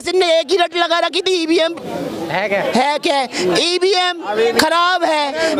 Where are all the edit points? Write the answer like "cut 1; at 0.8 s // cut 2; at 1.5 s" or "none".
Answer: none